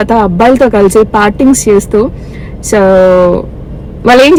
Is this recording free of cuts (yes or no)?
yes